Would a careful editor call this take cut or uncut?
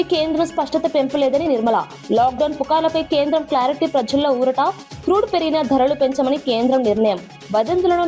uncut